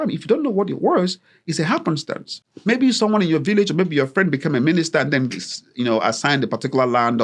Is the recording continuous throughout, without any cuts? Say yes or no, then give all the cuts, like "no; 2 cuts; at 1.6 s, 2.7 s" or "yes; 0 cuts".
yes; 0 cuts